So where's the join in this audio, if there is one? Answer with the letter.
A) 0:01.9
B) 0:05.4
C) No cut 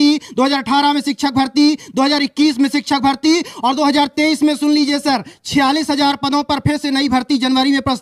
C